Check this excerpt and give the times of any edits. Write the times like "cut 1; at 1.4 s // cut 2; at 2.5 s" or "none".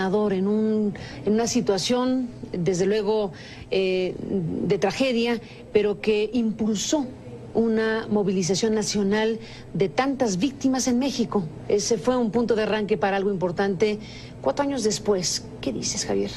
cut 1; at 4.8 s